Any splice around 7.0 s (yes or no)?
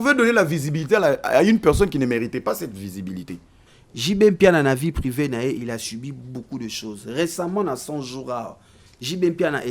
no